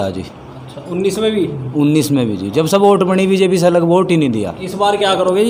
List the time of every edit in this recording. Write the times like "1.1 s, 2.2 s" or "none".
none